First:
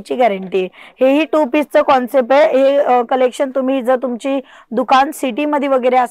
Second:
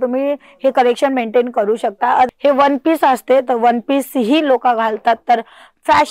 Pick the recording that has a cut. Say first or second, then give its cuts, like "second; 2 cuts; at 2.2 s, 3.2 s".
second; 1 cut; at 2.3 s